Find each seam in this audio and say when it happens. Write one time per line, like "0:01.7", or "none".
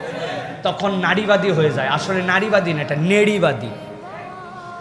none